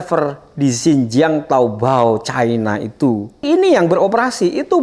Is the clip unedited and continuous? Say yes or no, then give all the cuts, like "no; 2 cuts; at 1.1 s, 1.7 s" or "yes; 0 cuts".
no; 1 cut; at 3.4 s